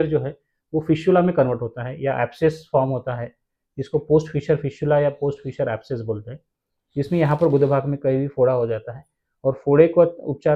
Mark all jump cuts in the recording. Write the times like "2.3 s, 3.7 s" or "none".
none